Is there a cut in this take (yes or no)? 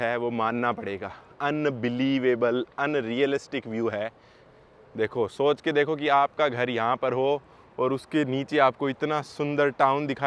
no